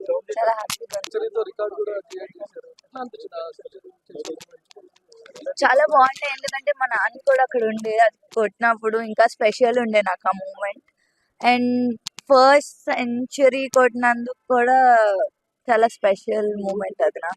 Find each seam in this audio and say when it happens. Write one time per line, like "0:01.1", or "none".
0:01.1